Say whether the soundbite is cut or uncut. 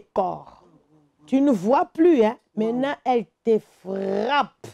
uncut